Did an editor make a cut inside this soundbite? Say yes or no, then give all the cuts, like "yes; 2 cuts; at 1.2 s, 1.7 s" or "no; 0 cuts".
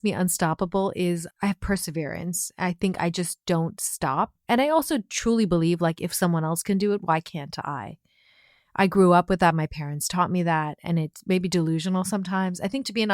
yes; 1 cut; at 1.2 s